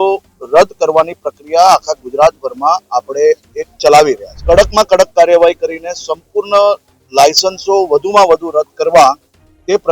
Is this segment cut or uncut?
cut